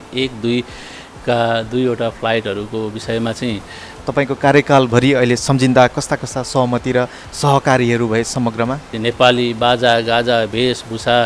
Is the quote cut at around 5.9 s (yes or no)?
no